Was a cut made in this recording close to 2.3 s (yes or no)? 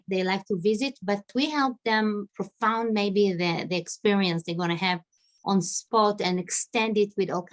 yes